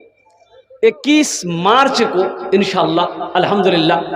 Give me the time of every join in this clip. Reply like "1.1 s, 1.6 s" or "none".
none